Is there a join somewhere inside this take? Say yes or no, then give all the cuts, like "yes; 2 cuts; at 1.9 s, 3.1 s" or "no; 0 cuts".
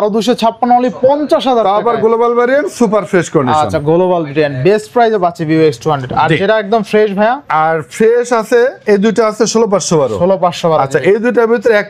no; 0 cuts